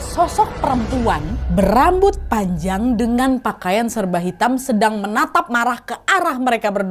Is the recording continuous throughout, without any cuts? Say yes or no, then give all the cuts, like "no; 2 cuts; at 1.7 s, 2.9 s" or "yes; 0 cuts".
yes; 0 cuts